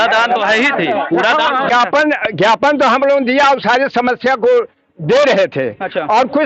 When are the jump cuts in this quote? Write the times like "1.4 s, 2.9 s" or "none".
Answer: 1.7 s